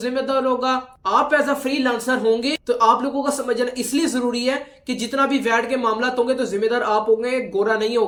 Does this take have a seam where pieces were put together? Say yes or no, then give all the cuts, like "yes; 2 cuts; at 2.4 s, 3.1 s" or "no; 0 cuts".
no; 0 cuts